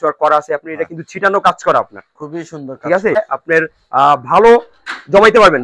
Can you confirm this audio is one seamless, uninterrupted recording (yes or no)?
no